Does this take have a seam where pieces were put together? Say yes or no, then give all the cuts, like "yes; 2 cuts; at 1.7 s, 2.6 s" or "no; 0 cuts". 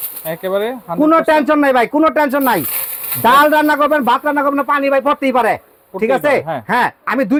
no; 0 cuts